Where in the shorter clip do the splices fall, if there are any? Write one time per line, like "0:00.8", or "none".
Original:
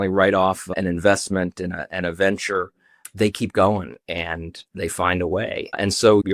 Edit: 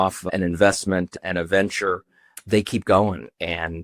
0:01.1